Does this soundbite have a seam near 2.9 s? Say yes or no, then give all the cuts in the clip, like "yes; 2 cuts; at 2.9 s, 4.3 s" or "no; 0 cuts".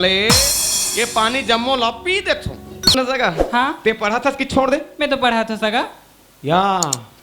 yes; 1 cut; at 2.9 s